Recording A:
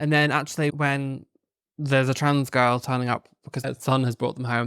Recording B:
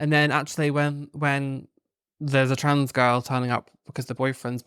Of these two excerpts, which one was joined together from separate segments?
A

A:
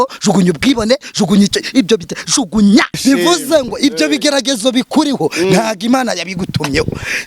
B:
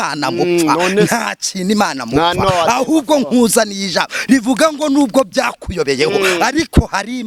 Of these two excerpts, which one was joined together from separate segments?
A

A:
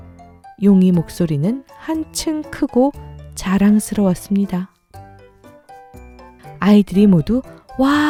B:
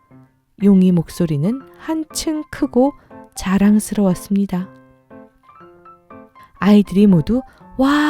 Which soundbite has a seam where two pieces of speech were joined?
B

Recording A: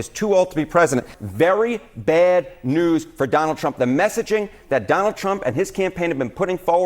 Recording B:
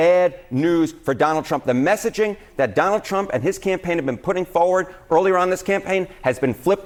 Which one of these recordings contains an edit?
A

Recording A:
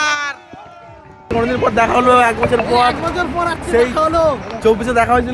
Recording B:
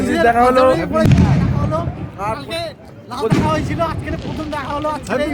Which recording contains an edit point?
A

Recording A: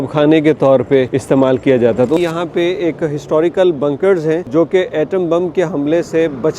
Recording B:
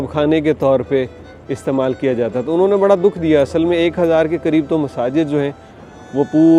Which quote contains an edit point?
A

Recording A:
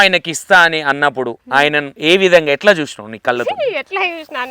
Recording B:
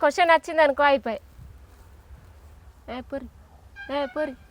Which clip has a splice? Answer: A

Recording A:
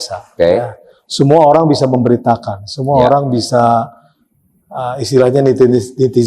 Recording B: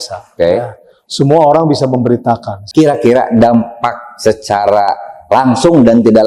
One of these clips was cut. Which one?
B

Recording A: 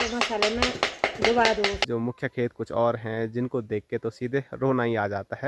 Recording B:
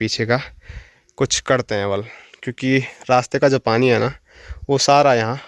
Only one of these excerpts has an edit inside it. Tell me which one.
A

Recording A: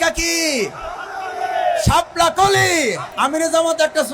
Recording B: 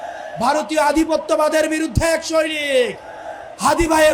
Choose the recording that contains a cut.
A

